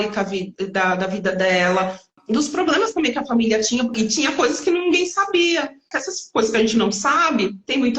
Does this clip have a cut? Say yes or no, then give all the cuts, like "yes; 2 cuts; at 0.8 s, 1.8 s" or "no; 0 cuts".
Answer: yes; 3 cuts; at 2.1 s, 3.9 s, 5.9 s